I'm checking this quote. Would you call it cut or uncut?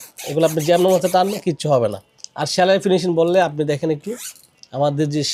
uncut